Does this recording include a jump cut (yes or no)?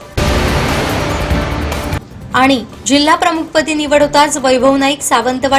no